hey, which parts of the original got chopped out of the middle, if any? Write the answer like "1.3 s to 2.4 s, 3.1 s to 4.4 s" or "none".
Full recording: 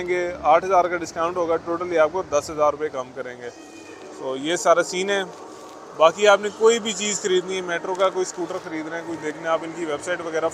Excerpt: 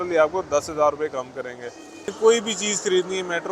3.9 s to 6.5 s